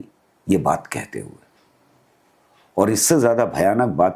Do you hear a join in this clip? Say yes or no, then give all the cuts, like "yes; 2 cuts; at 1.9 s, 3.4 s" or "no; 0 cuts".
no; 0 cuts